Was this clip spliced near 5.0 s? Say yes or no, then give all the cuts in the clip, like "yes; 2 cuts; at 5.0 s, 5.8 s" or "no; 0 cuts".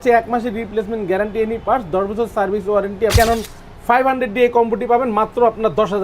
no; 1 cut; at 3.1 s